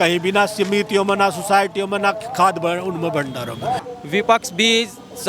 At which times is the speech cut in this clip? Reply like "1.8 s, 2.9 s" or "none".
3.8 s

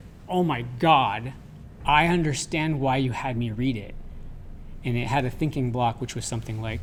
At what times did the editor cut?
none

